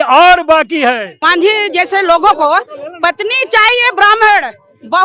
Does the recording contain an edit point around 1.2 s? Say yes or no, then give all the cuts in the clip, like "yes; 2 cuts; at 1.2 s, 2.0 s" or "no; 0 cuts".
yes; 1 cut; at 1.2 s